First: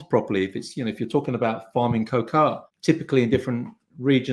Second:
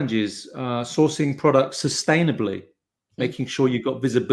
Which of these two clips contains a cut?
first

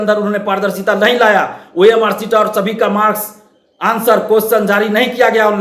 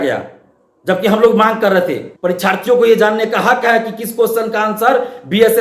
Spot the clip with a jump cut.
second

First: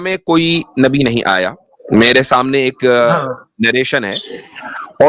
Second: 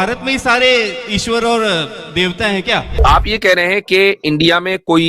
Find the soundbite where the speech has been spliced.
second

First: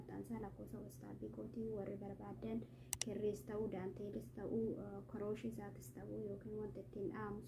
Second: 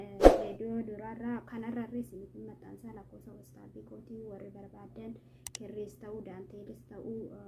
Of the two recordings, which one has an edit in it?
second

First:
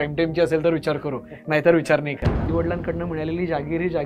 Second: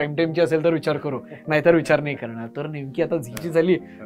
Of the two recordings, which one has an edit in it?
first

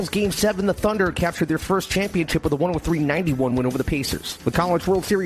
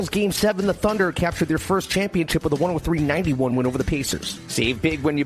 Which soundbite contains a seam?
first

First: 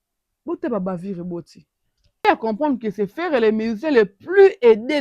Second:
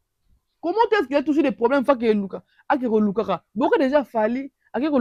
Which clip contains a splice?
first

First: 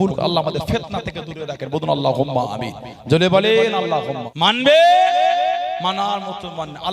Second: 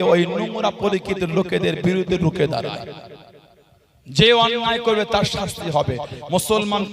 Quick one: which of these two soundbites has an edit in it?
first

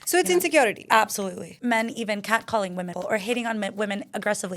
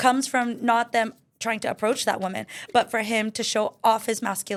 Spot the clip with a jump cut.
first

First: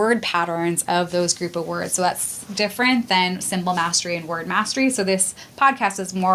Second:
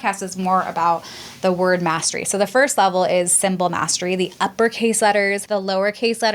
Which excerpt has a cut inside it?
second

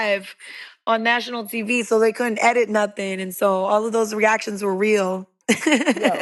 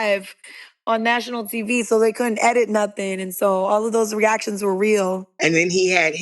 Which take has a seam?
second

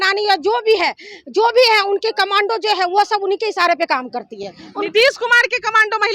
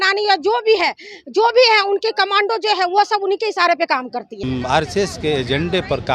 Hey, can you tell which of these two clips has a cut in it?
second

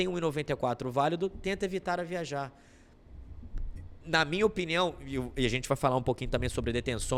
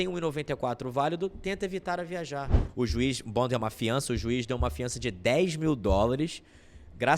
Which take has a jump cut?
second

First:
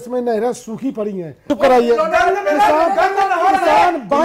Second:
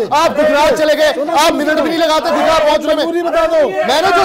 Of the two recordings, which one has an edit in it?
first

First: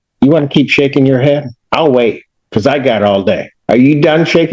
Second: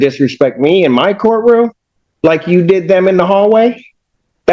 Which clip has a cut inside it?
first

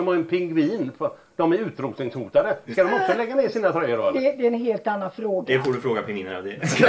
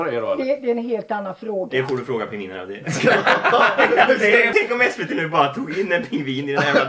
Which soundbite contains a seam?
second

